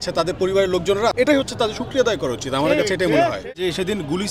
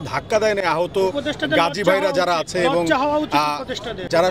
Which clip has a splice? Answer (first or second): first